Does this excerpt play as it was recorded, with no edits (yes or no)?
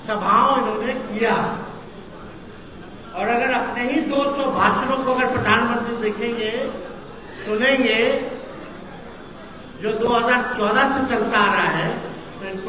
yes